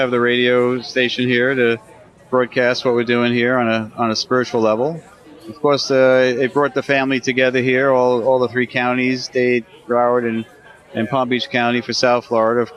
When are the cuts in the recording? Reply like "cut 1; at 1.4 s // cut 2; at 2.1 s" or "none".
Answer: none